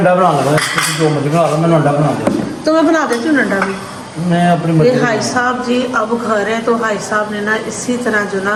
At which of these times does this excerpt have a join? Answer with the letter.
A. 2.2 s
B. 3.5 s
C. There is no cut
C